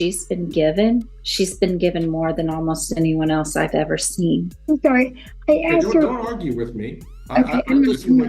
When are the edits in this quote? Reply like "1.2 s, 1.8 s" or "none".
1.2 s, 4.5 s